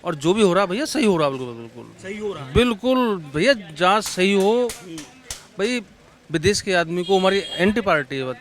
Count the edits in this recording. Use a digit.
0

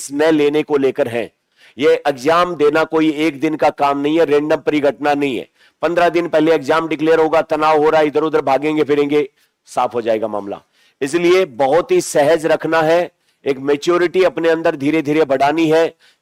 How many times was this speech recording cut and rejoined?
0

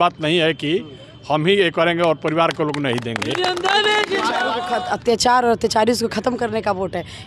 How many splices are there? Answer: 1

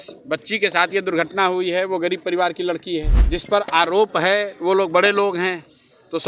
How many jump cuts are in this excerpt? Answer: 1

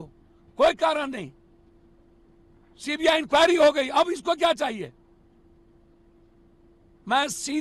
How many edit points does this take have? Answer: 0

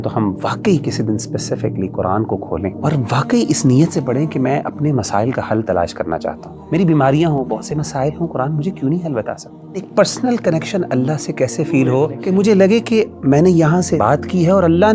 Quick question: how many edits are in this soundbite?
5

